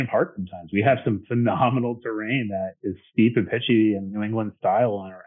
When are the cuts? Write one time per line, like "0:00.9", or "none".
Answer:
none